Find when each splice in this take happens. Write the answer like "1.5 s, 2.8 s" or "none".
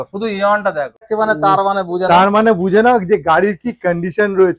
1.0 s